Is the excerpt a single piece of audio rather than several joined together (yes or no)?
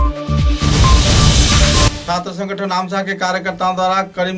yes